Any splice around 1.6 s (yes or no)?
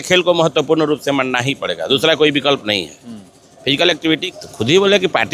no